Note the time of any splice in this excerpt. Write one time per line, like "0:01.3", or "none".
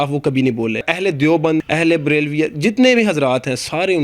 0:00.9
0:01.6